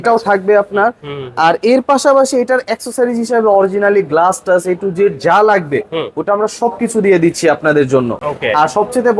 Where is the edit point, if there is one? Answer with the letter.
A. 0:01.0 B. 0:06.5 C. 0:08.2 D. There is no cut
D